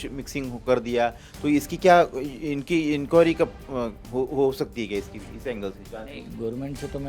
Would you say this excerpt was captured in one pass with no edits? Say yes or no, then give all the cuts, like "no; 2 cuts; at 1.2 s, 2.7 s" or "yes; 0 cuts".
yes; 0 cuts